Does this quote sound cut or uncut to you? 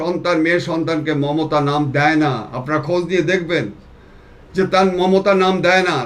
uncut